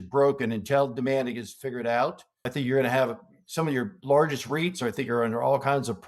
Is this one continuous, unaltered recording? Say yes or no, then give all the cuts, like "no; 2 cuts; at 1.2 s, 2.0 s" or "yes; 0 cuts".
no; 1 cut; at 2.3 s